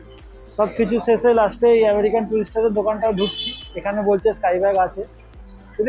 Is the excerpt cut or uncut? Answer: uncut